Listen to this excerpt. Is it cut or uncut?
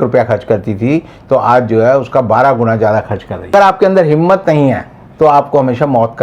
cut